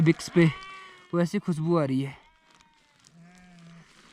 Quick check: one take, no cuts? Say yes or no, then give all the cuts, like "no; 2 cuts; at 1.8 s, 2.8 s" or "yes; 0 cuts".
yes; 0 cuts